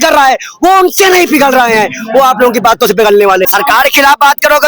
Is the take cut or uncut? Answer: cut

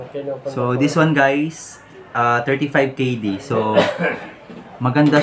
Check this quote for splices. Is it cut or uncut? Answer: uncut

